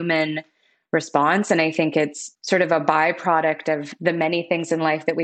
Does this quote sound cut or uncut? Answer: cut